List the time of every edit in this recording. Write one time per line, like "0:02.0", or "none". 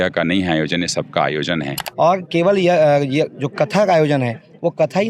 0:01.8